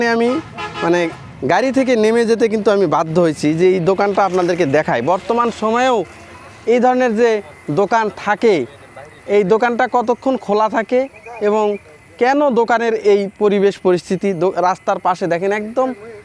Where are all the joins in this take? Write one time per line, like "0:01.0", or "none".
none